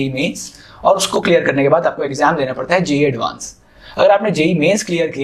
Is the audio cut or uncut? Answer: uncut